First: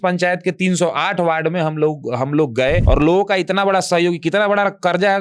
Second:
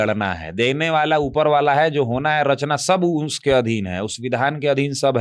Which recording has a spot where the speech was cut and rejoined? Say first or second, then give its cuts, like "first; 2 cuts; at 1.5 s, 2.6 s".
first; 1 cut; at 2.8 s